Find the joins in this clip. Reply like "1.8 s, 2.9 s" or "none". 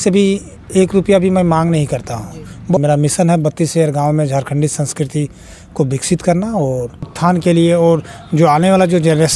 2.8 s, 7.1 s